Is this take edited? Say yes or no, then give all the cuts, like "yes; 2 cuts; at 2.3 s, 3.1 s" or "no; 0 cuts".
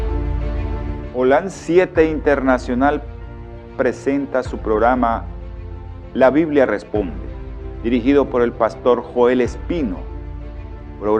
yes; 1 cut; at 4.0 s